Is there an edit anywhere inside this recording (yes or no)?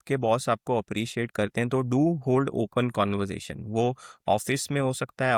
no